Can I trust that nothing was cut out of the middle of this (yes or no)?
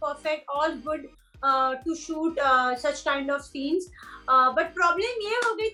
yes